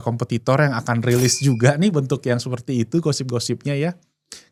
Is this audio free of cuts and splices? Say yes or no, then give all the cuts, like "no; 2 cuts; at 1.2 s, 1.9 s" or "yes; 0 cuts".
yes; 0 cuts